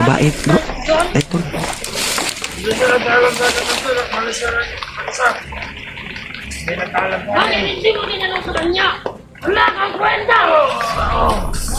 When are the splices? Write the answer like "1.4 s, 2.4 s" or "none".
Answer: none